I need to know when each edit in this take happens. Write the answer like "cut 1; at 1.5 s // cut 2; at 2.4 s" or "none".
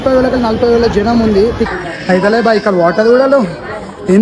cut 1; at 1.7 s